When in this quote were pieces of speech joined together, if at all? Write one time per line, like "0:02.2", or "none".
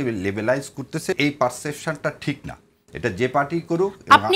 0:01.2